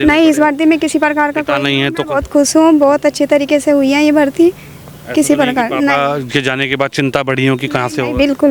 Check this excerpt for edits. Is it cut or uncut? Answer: uncut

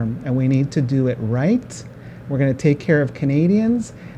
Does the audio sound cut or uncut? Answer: uncut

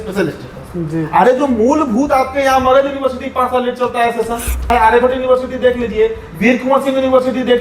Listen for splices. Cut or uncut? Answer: cut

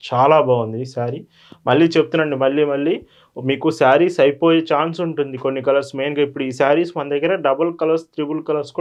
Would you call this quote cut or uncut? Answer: uncut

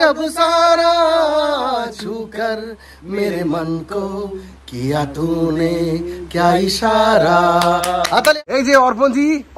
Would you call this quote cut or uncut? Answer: cut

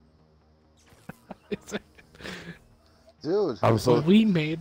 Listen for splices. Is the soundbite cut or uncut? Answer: uncut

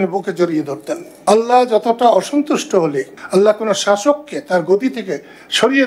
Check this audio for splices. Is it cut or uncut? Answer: cut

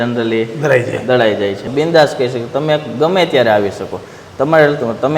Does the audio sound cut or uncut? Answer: cut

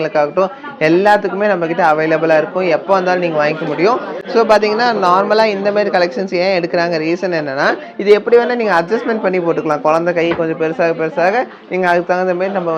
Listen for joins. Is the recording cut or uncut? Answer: uncut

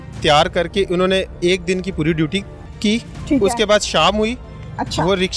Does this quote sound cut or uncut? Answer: uncut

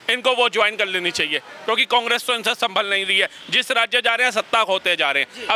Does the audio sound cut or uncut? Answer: uncut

